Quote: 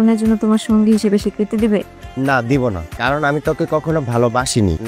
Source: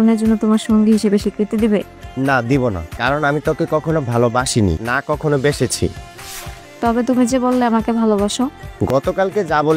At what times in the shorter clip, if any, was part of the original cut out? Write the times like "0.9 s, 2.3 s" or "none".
none

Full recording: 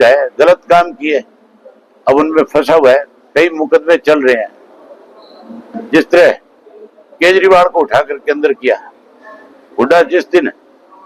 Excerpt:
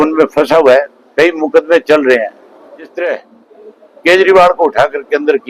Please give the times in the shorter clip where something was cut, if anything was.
2.9 s

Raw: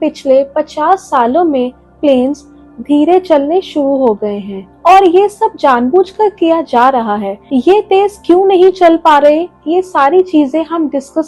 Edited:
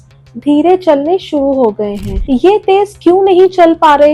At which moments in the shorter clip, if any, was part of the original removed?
2.1 s

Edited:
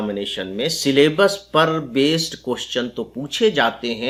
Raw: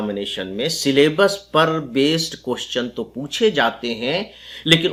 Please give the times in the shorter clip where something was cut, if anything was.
none

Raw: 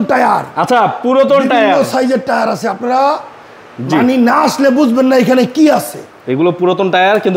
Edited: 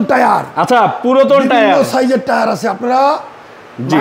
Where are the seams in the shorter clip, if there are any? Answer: none

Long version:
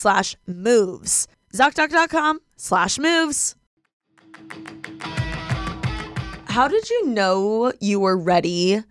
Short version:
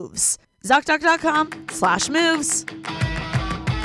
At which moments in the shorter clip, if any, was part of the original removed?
2.5 s

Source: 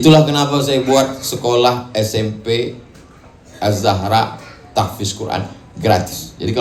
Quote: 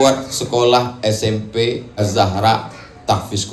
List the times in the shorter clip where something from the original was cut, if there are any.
2.0 s

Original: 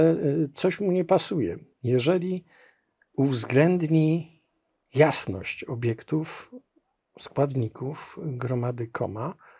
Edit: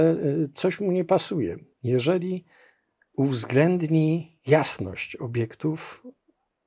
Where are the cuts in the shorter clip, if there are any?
4.3 s

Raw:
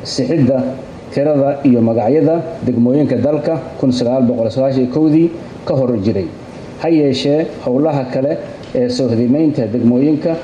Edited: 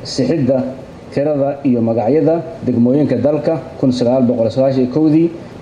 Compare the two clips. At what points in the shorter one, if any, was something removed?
none

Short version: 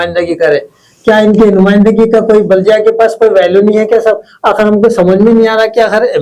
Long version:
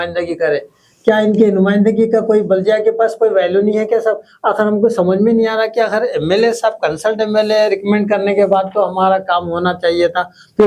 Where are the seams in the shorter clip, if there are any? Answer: none

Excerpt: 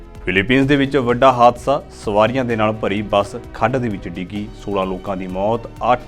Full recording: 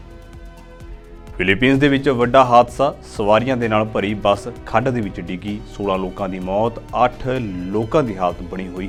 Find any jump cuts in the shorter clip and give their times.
none

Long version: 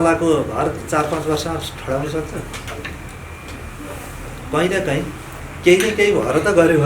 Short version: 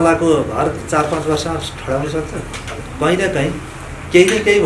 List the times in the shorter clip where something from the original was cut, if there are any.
2.8 s

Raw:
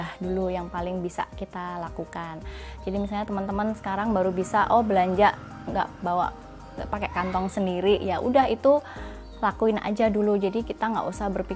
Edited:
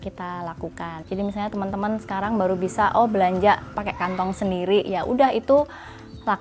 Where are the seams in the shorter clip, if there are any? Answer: 1.0 s, 3.7 s

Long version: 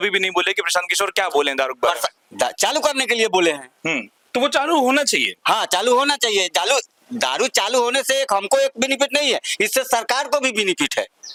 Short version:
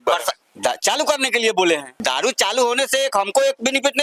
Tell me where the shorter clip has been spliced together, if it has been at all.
1.9 s

